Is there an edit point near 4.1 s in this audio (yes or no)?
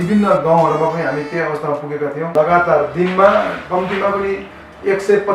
no